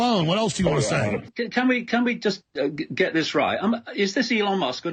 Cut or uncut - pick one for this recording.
cut